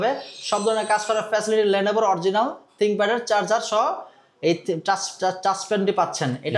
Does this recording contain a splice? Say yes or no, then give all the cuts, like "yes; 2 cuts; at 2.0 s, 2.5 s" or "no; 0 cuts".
no; 0 cuts